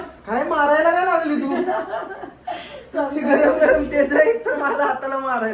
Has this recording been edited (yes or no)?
no